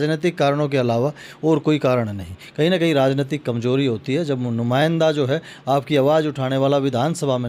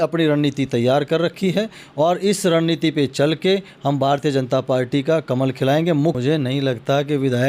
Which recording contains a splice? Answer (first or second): second